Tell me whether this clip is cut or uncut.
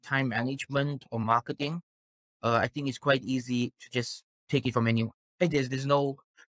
uncut